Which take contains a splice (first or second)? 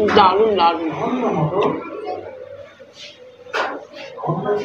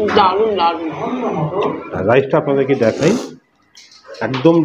second